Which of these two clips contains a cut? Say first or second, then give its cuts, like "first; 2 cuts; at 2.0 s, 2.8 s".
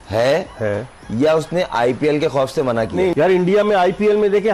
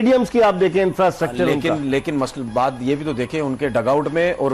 first; 1 cut; at 3.1 s